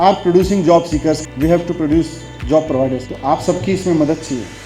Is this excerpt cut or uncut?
uncut